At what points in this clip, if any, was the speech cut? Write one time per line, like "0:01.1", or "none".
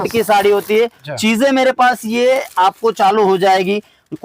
0:01.0